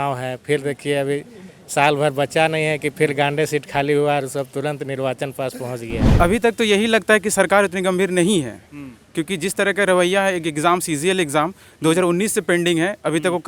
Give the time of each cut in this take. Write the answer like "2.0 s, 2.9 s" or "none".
6.1 s